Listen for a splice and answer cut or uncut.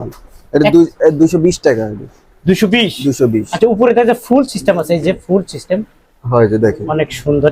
uncut